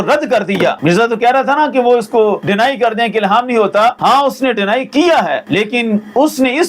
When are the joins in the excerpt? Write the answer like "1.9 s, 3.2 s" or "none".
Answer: 0.8 s, 2.4 s, 4.0 s, 5.4 s